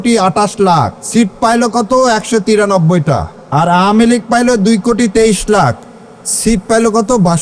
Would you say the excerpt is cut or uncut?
cut